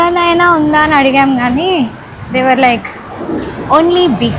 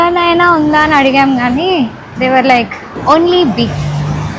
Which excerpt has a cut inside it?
second; 2 cuts; at 2.0 s, 2.9 s

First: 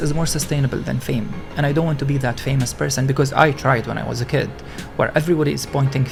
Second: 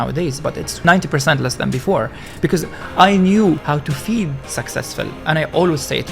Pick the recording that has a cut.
second; 2 cuts; at 0.8 s, 3.6 s

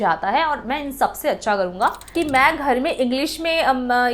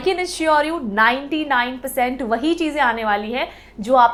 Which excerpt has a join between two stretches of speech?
first; 1 cut; at 2.1 s

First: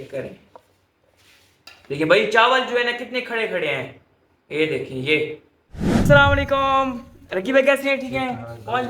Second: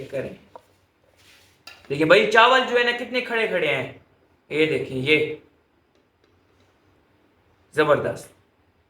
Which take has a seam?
first; 1 cut; at 6.0 s

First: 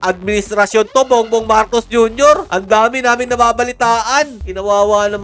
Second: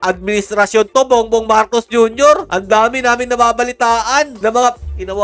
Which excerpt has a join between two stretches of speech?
first; 1 cut; at 4.3 s

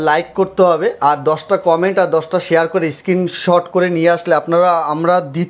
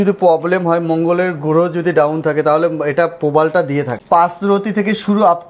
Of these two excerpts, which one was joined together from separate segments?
second; 1 cut; at 4.0 s

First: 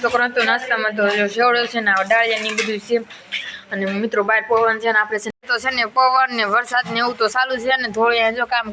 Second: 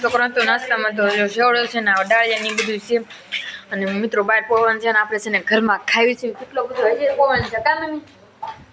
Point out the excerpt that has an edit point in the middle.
first; 1 cut; at 5.3 s

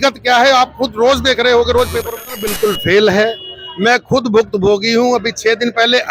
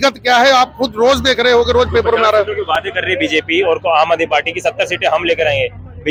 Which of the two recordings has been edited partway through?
first; 1 cut; at 2.3 s

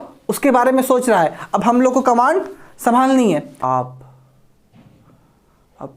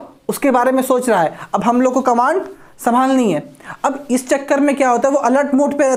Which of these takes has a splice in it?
first; 1 cut; at 3.5 s

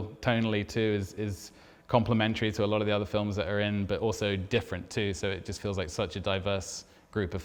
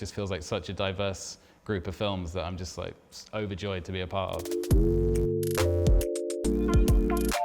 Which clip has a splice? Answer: second; 1 cut; at 4.5 s

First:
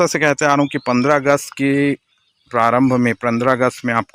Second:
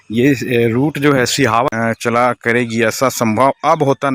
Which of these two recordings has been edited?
second; 1 cut; at 1.7 s

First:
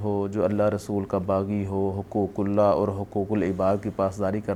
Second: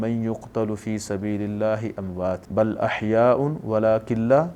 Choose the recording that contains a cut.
second; 1 cut; at 2.4 s

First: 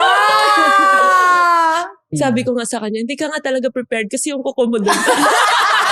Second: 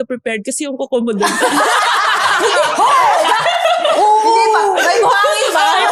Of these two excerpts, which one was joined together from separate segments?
first; 1 cut; at 2.1 s

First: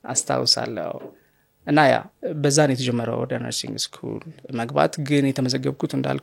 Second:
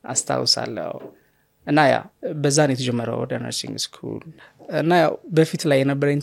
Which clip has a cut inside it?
second; 1 cut; at 4.3 s

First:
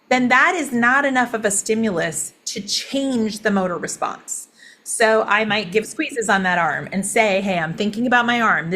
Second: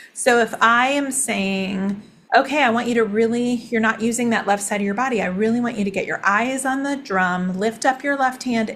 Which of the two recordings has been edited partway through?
second; 1 cut; at 2.1 s

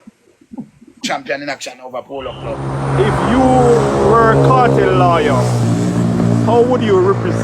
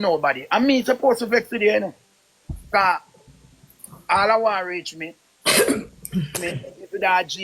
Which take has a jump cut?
first; 1 cut; at 2.6 s

